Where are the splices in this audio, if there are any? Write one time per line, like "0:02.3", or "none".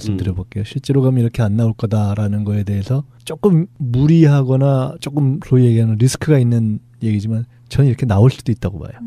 0:03.5